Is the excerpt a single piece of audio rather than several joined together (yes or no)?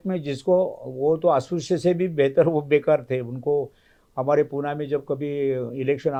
yes